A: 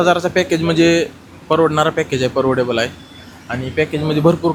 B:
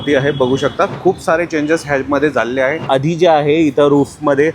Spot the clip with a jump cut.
B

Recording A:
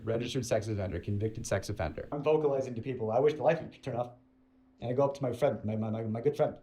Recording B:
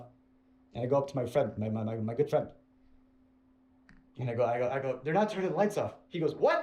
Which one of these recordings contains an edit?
A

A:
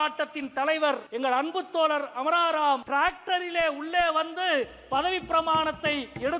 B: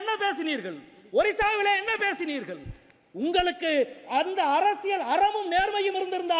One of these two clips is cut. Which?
A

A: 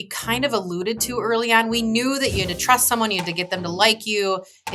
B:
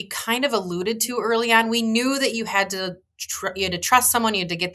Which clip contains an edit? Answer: A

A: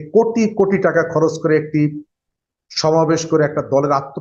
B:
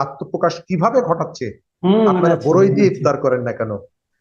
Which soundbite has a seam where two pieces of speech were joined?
B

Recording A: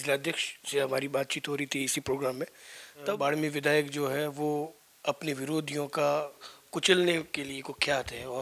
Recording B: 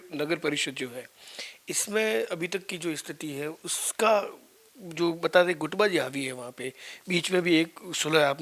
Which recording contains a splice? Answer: A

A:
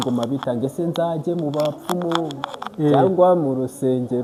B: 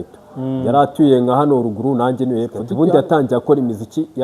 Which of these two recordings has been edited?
B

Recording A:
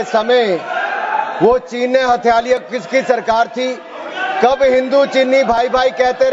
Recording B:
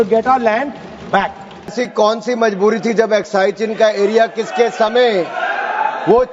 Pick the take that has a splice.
B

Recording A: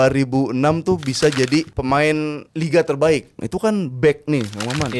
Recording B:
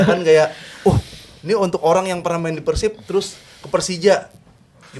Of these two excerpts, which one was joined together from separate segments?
A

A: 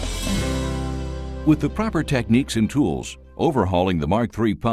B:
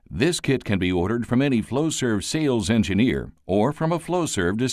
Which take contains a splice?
A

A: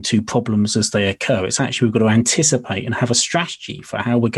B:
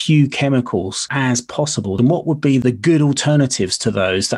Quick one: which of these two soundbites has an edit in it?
B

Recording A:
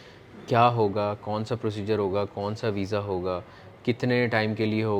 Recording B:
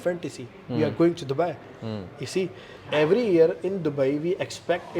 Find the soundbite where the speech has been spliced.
B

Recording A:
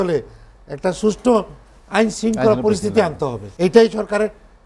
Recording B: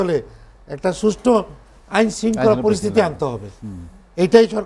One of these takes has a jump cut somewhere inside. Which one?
A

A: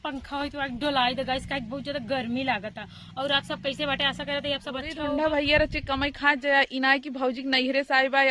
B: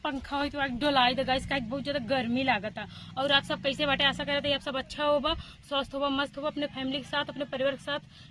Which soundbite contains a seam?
A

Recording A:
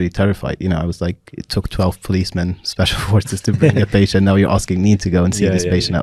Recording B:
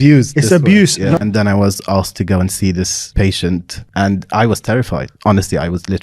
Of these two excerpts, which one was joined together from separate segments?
B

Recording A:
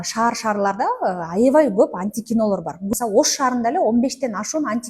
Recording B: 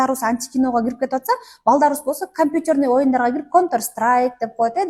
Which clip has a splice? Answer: A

